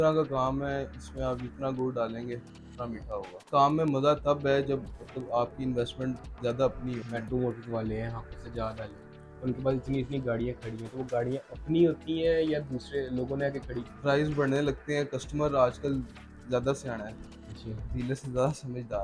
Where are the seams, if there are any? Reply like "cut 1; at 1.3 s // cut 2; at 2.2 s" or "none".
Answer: cut 1; at 3.4 s // cut 2; at 7.0 s // cut 3; at 13.8 s